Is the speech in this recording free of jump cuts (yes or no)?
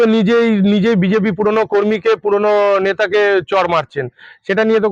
yes